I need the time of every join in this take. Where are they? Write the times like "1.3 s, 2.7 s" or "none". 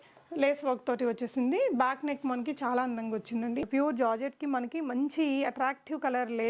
3.7 s